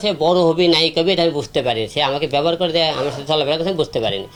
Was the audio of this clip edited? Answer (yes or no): no